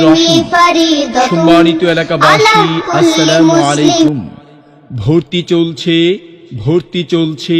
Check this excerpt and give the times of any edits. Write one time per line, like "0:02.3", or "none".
0:04.1